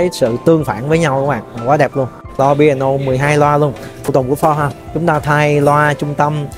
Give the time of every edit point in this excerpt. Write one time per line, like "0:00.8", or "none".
0:02.4
0:04.0